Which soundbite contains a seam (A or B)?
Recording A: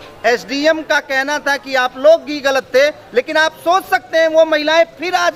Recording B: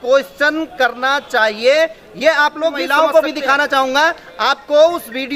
B